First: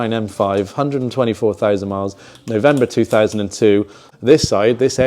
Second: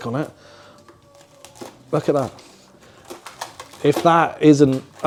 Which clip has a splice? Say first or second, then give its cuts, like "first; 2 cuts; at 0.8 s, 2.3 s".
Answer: first; 1 cut; at 4.0 s